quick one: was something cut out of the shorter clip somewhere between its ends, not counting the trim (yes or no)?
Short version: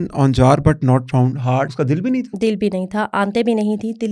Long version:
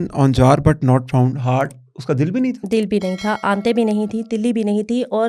yes